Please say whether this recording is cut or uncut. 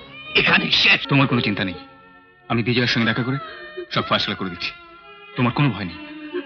cut